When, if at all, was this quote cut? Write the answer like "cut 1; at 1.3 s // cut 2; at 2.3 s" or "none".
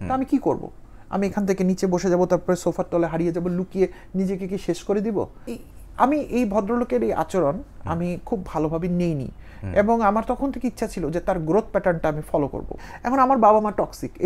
cut 1; at 5.4 s // cut 2; at 12.8 s